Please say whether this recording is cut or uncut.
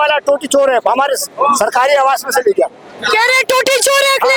uncut